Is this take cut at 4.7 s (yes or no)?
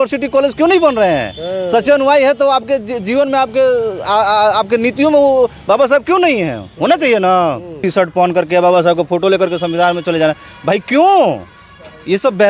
no